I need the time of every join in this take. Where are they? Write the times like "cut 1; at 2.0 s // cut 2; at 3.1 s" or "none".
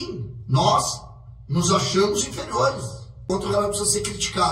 cut 1; at 3.3 s